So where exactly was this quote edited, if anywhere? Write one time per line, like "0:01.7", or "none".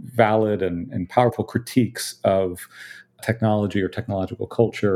none